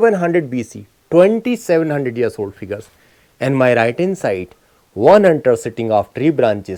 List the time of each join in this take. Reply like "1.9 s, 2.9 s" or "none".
none